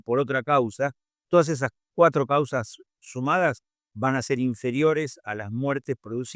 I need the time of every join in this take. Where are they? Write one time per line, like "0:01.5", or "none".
none